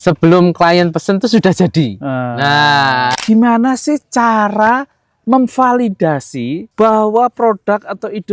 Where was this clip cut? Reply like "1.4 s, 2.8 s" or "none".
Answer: 3.2 s, 6.6 s